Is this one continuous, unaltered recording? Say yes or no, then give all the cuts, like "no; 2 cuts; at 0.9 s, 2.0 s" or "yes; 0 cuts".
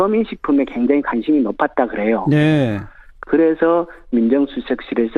no; 1 cut; at 2.6 s